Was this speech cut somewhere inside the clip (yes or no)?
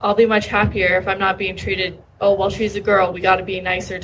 no